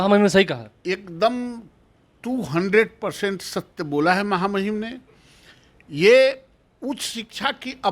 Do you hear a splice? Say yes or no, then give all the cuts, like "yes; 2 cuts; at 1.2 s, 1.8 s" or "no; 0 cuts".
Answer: no; 0 cuts